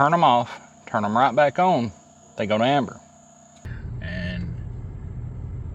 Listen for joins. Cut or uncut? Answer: cut